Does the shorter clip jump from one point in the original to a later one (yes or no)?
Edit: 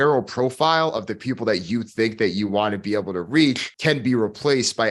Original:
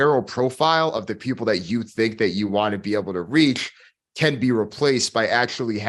yes